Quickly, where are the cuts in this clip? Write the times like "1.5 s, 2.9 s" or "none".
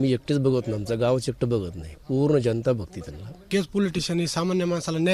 3.4 s